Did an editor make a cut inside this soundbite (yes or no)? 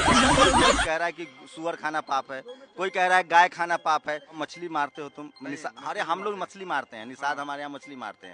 yes